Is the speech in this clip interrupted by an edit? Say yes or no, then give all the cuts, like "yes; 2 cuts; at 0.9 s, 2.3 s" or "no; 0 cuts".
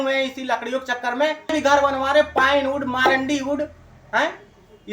yes; 1 cut; at 1.5 s